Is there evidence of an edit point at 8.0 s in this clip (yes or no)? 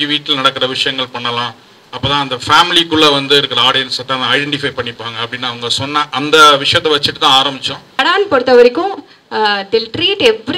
yes